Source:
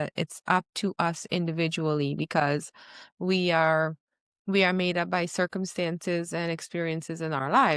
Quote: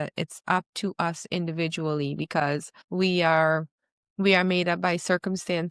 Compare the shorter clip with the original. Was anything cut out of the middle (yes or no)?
yes